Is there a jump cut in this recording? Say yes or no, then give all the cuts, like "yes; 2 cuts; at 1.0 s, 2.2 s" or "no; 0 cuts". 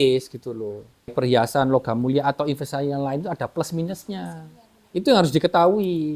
yes; 1 cut; at 1.1 s